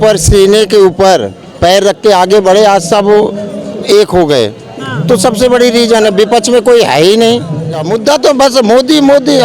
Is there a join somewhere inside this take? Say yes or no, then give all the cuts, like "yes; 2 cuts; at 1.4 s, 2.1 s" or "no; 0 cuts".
yes; 1 cut; at 7.9 s